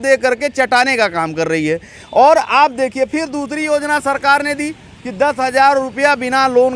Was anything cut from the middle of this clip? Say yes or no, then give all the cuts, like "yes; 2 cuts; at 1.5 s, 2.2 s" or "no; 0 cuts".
no; 0 cuts